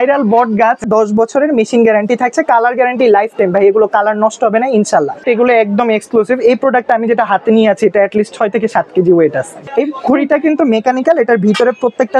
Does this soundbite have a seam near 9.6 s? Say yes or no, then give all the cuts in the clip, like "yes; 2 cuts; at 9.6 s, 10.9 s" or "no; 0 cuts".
yes; 3 cuts; at 0.9 s, 5.2 s, 9.6 s